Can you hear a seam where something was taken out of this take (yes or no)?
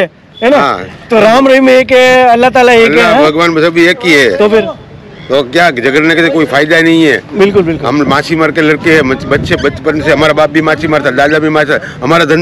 no